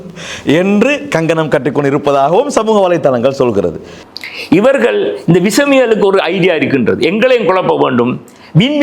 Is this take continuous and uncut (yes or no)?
no